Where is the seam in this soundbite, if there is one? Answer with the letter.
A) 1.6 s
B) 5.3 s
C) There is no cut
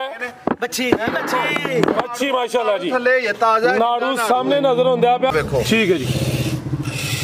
B